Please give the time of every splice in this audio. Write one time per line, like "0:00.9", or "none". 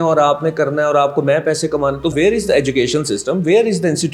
0:02.1